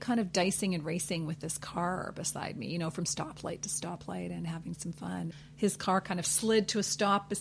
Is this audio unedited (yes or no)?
no